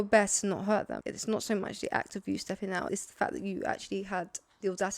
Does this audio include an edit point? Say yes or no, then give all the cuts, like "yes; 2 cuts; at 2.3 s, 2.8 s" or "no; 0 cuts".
yes; 2 cuts; at 1.0 s, 2.9 s